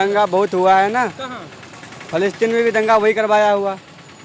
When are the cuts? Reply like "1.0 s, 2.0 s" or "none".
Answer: none